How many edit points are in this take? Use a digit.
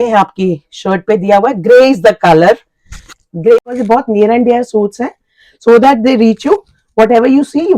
1